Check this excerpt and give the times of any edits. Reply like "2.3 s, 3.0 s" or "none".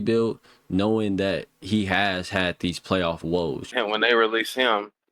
3.7 s